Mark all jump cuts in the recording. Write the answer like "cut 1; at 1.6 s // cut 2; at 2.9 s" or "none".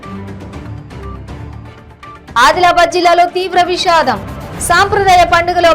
cut 1; at 1.0 s